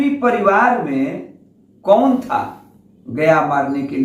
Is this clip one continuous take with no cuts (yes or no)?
yes